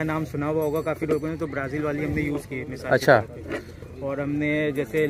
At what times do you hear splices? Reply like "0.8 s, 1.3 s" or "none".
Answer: none